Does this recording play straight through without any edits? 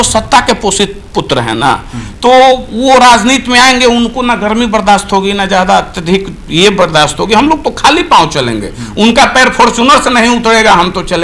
yes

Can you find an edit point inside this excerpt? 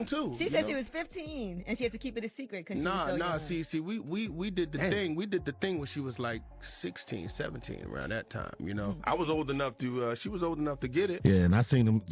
yes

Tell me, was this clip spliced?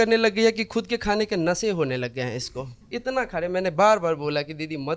yes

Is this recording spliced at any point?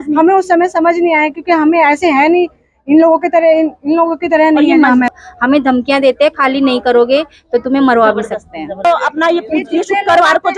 yes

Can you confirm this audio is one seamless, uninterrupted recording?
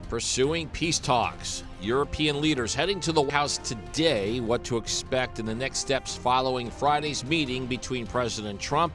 no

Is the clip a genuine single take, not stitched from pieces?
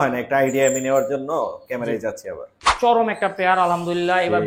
no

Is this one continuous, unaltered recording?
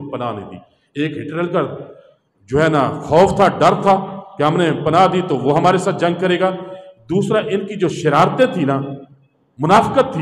yes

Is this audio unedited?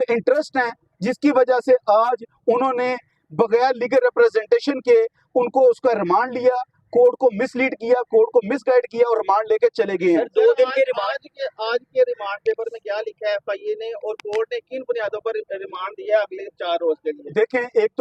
yes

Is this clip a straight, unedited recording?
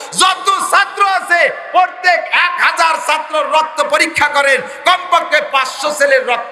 yes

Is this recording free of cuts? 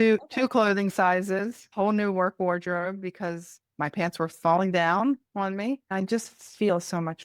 no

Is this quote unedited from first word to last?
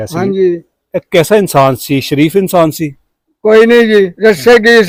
yes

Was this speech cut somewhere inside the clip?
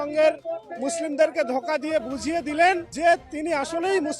yes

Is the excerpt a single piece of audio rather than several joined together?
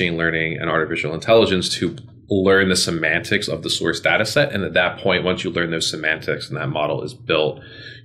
yes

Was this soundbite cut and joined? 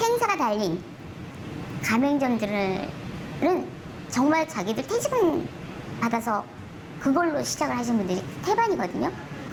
no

